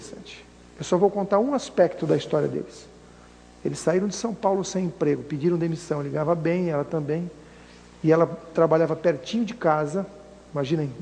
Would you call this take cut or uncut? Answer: uncut